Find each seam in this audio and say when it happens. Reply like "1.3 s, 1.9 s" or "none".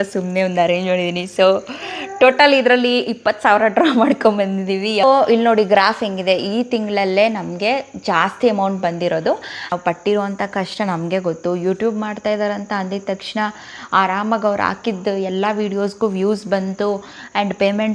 5.0 s, 9.7 s